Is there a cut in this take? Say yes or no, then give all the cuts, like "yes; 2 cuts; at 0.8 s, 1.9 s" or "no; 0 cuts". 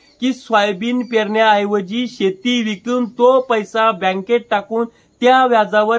no; 0 cuts